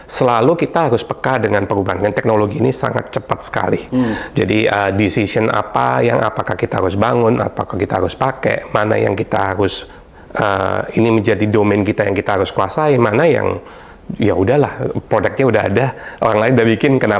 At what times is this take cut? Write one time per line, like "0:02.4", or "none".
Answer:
none